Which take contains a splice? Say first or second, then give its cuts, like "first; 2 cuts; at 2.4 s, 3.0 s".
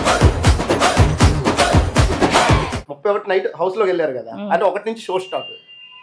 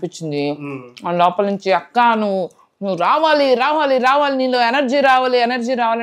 first; 1 cut; at 2.8 s